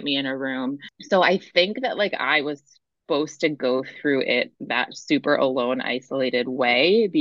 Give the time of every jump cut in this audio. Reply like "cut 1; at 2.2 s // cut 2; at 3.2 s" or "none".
cut 1; at 0.9 s